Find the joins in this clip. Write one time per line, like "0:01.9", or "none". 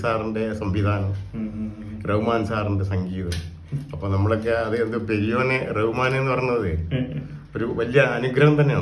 none